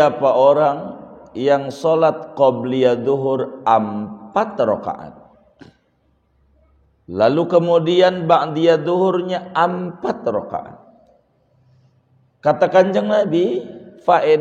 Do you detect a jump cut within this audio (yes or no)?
no